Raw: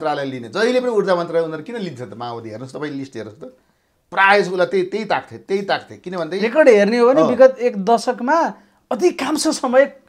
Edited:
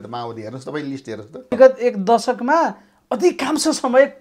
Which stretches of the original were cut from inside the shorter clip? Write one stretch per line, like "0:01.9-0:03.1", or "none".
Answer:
0:03.6-0:07.3